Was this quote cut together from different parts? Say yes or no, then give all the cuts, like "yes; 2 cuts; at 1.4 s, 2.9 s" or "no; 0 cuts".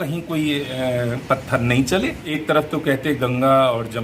yes; 1 cut; at 2.3 s